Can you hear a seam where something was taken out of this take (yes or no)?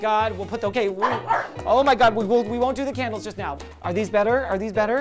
yes